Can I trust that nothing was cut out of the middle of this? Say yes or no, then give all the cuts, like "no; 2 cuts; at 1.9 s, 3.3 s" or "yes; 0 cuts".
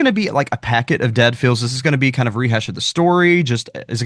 yes; 0 cuts